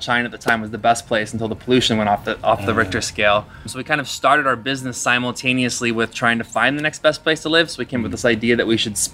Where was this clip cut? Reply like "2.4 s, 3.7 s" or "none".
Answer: 3.8 s